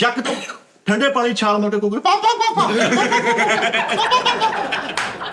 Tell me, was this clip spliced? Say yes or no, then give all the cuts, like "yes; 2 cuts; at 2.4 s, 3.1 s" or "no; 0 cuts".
no; 0 cuts